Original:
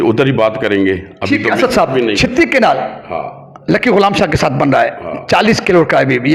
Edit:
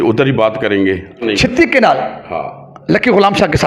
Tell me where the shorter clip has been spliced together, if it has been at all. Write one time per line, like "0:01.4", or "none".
0:01.2